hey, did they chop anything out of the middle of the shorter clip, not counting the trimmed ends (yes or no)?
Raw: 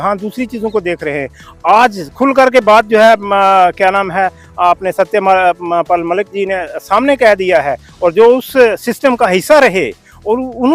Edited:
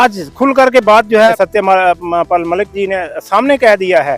yes